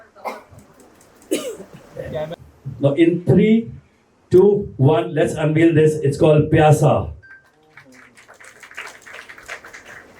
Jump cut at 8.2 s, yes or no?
no